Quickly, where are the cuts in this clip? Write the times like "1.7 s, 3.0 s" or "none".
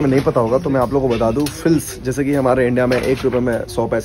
none